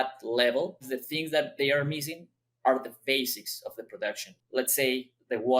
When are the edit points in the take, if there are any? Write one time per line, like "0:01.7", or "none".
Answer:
0:00.9
0:04.4